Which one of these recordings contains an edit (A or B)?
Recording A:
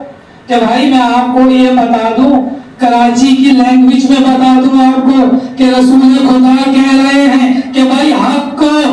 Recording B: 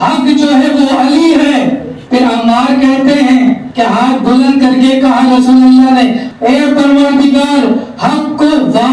B